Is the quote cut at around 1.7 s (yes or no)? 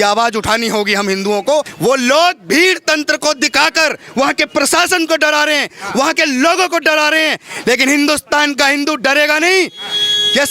yes